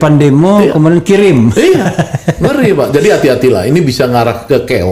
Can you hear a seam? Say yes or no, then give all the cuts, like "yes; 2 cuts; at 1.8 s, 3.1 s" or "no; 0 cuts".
no; 0 cuts